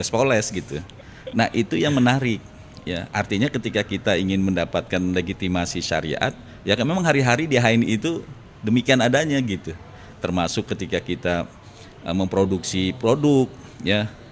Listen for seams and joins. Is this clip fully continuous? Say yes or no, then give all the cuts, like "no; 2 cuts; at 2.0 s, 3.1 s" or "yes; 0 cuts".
yes; 0 cuts